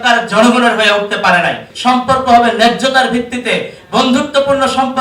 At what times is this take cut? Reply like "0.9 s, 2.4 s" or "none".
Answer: 1.7 s